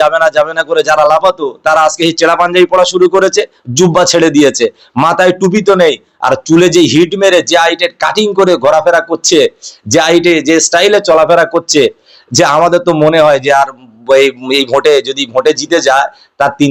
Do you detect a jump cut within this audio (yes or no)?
no